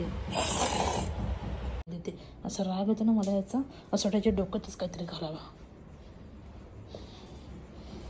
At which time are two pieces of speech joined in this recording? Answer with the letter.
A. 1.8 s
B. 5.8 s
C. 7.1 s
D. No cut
A